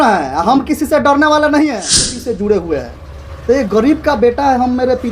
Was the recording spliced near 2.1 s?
yes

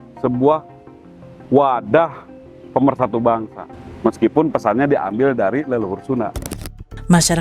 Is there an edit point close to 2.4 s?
no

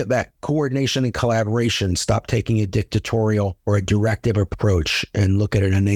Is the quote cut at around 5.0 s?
no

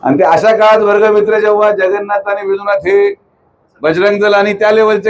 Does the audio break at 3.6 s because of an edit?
yes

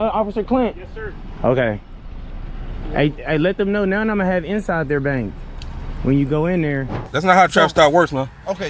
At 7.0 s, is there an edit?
yes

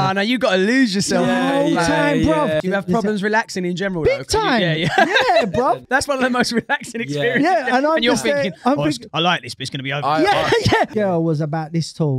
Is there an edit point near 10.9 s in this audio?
yes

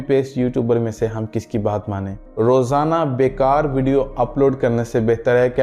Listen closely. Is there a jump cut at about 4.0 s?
no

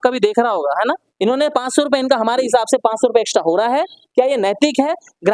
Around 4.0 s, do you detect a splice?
no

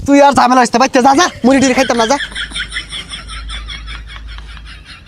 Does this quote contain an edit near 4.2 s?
no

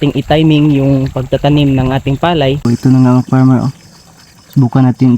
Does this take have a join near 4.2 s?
no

